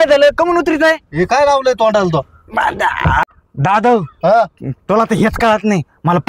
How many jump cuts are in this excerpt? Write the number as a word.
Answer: one